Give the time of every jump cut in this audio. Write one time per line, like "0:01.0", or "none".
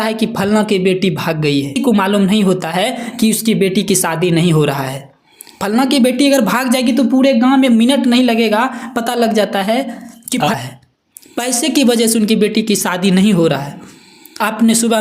0:01.7
0:10.5